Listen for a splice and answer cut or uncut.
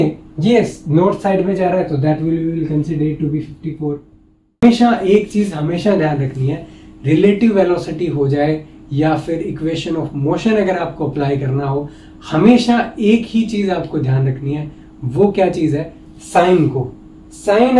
cut